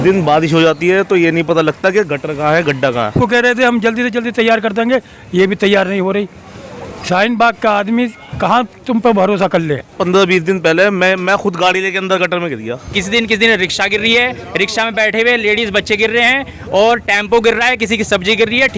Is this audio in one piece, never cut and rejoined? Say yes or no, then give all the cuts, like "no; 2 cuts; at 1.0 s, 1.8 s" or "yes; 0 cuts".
no; 3 cuts; at 3.2 s, 9.9 s, 12.9 s